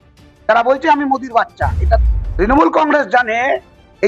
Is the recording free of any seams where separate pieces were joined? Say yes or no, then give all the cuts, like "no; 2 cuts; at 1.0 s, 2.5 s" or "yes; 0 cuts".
no; 1 cut; at 2.1 s